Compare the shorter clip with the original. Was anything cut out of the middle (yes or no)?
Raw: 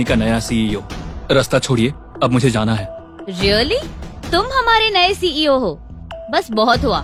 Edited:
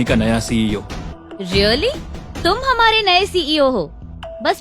yes